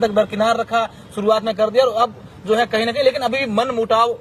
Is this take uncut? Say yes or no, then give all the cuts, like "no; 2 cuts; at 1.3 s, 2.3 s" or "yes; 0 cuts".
yes; 0 cuts